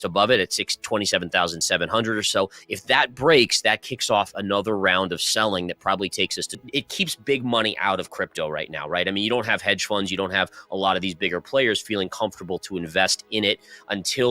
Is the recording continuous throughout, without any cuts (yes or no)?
no